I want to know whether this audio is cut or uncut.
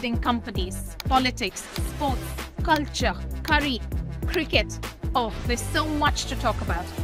uncut